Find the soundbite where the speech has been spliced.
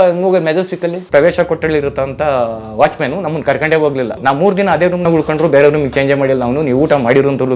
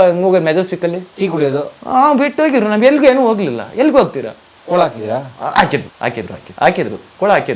first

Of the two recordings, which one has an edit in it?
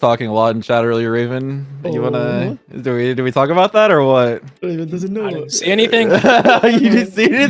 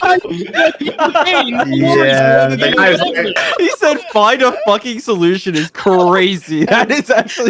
second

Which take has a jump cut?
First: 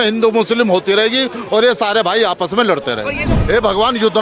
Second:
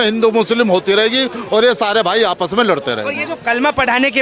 first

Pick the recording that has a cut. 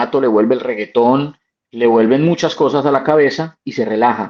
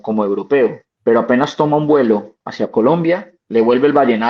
second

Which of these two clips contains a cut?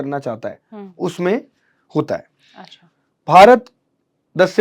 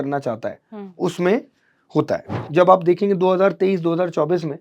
second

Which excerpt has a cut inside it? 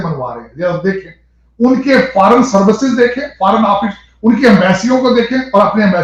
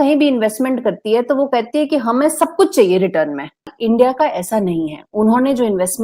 second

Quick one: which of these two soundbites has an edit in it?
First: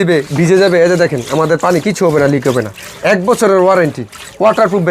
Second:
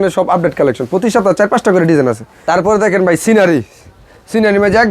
second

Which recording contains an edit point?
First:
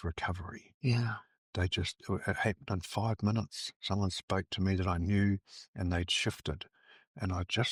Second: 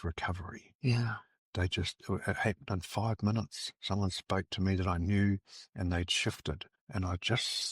second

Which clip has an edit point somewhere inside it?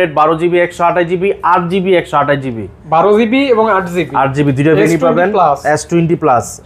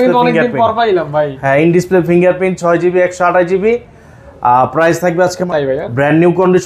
second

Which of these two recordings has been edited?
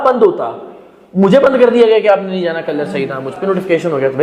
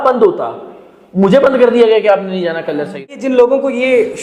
second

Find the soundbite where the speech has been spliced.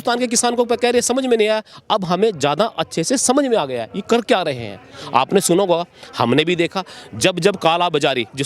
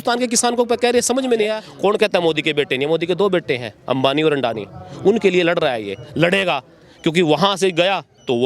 second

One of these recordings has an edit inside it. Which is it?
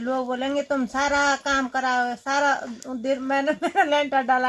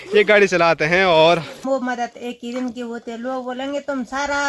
second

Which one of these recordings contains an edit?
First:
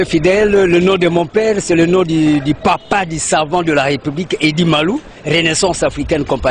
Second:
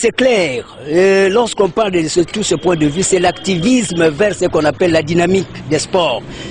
second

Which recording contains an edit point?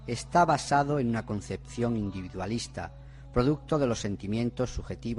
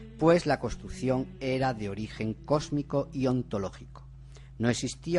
first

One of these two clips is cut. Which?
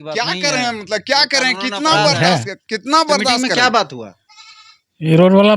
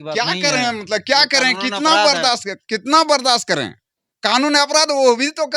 first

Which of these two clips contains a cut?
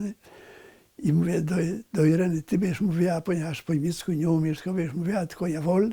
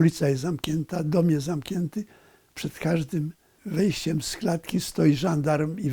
second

